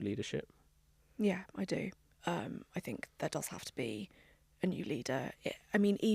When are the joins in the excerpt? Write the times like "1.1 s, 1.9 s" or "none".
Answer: 2.1 s